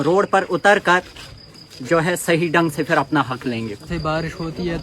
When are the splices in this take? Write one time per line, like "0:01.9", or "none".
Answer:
0:03.9